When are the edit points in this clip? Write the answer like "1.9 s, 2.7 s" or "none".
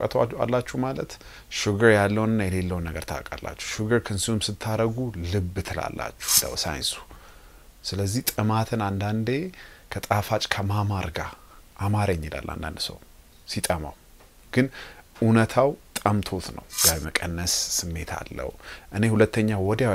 6.4 s, 16.7 s